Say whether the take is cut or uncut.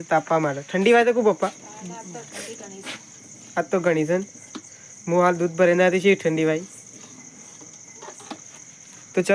uncut